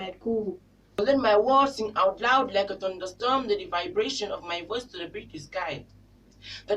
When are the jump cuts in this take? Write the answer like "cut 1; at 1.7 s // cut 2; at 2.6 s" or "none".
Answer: cut 1; at 1.0 s